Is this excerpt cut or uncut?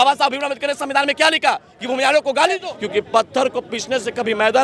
cut